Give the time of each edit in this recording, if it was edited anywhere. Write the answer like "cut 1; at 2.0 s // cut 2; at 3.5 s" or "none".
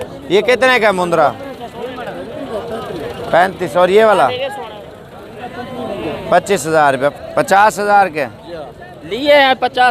cut 1; at 7.1 s